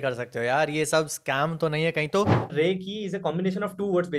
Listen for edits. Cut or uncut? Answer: cut